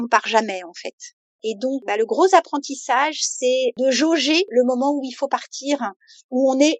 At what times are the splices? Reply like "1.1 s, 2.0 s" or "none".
1.8 s, 3.8 s, 4.5 s